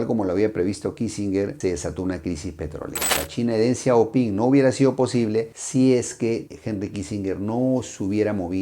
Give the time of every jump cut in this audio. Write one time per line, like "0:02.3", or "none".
0:03.2